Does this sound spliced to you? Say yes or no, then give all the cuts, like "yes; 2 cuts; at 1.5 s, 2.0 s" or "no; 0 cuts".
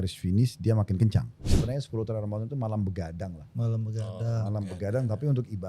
yes; 1 cut; at 1.5 s